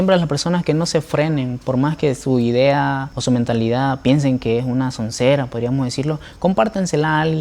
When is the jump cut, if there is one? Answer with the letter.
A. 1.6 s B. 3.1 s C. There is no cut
B